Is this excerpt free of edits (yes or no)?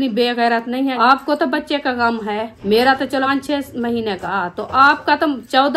no